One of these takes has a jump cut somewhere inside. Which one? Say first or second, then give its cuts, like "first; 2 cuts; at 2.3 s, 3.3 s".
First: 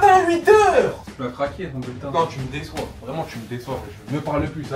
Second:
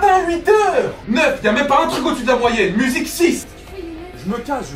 second; 2 cuts; at 1.0 s, 3.6 s